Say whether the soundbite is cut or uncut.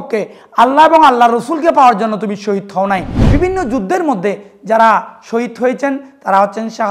cut